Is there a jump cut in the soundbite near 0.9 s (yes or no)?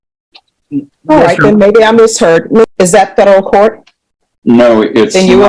no